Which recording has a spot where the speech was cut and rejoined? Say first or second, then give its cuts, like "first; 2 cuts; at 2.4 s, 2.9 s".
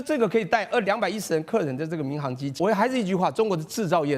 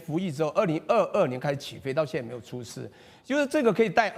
first; 1 cut; at 2.6 s